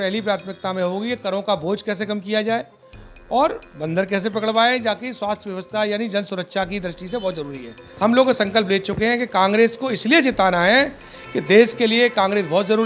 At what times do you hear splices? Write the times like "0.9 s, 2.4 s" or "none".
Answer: 7.8 s

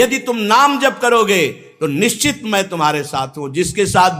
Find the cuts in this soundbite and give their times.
none

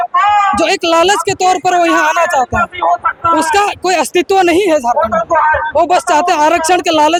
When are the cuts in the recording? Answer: none

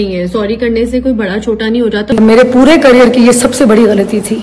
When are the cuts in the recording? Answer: 2.1 s

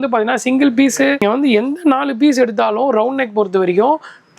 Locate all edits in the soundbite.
1.2 s

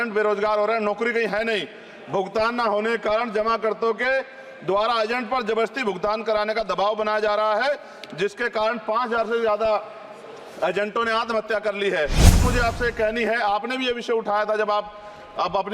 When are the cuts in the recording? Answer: 12.4 s

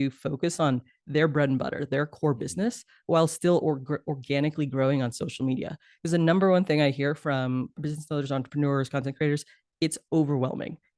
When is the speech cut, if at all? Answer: 7.8 s

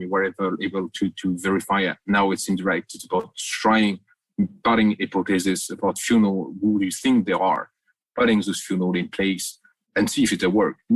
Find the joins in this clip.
9.9 s

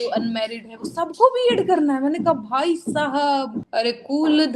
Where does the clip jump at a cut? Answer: 3.6 s

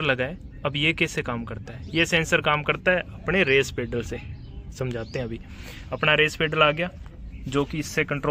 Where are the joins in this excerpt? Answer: none

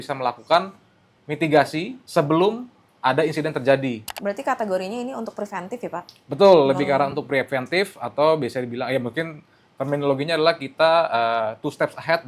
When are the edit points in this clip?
4.1 s

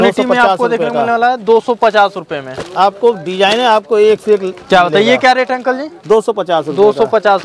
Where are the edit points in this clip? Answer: none

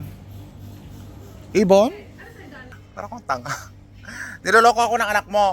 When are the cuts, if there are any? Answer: 2.8 s

